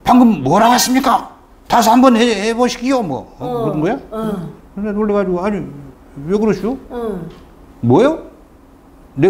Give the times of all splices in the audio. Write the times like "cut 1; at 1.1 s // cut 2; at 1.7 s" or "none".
cut 1; at 4.6 s